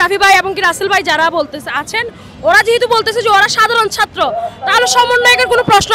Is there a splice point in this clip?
no; 0 cuts

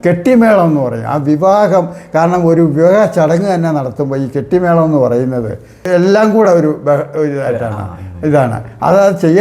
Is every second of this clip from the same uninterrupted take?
no; 1 cut; at 5.8 s

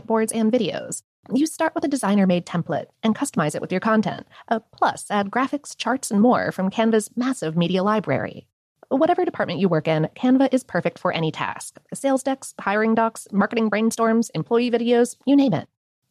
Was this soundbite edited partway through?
no; 0 cuts

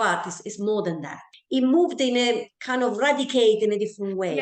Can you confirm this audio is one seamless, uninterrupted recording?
no; 1 cut; at 1.3 s

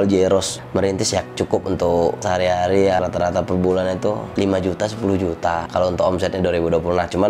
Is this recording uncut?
no; 3 cuts; at 1.2 s, 3.0 s, 5.6 s

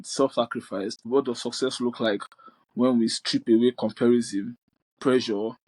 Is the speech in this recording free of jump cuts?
no; 1 cut; at 1.1 s

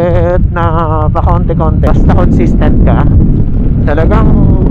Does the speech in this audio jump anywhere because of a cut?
yes; 1 cut; at 1.9 s

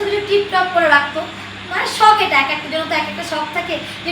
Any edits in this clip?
no; 0 cuts

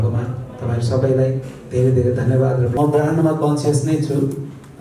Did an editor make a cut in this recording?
yes; 1 cut; at 2.7 s

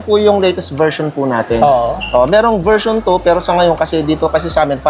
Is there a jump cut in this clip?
no; 0 cuts

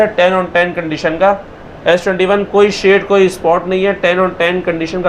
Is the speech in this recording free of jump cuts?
yes; 0 cuts

